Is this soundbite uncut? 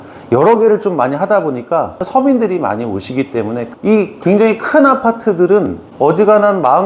no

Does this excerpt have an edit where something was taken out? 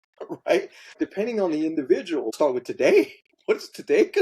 yes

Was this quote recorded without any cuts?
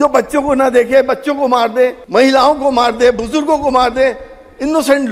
no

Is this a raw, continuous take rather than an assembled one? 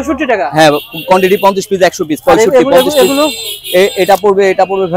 yes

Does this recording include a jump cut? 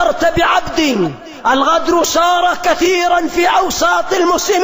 yes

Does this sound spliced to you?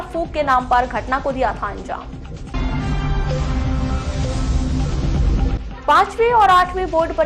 no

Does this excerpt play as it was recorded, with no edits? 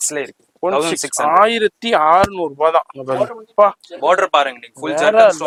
yes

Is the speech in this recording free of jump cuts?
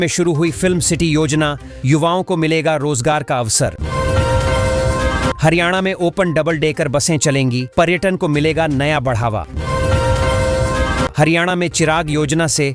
yes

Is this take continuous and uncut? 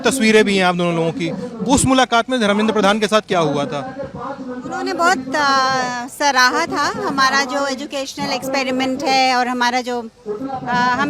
yes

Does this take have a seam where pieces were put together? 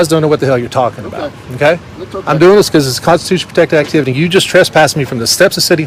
no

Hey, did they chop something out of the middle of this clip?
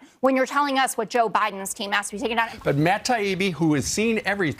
yes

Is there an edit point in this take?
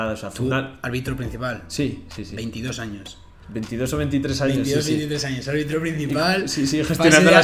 no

